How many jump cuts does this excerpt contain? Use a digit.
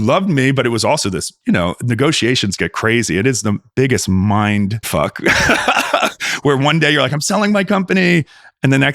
1